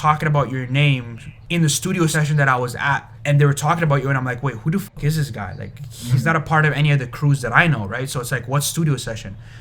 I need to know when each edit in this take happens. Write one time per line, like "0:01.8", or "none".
0:01.3
0:03.1